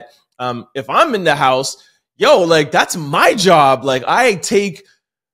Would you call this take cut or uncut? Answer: uncut